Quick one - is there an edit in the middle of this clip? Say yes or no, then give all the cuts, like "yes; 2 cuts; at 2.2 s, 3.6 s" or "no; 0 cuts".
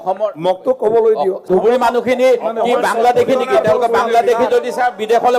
yes; 1 cut; at 1.5 s